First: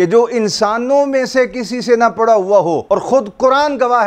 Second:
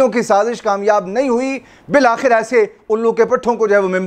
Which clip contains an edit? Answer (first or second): first